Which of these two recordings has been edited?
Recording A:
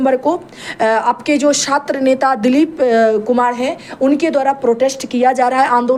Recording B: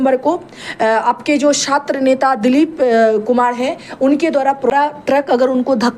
B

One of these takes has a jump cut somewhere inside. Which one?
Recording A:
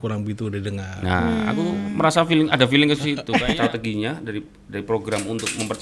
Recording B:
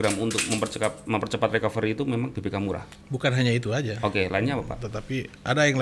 A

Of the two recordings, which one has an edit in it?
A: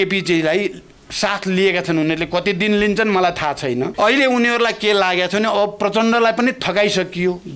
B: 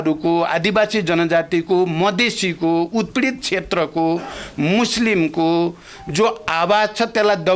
A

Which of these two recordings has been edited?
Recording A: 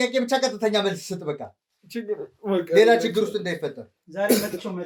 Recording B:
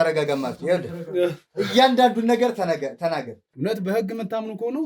B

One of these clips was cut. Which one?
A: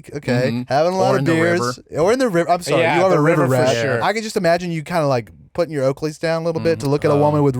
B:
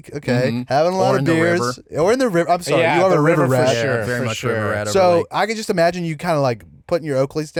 A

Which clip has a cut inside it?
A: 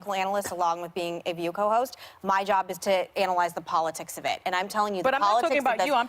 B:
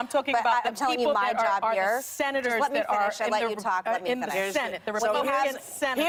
A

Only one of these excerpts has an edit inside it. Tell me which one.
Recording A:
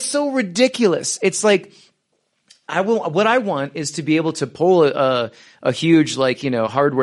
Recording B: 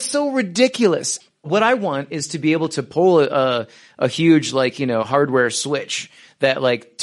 B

